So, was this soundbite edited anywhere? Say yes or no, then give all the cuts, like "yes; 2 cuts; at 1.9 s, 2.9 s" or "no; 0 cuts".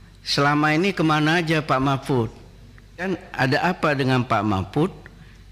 yes; 1 cut; at 3.1 s